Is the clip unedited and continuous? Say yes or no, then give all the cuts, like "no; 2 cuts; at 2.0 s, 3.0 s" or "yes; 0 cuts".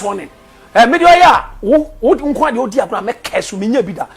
yes; 0 cuts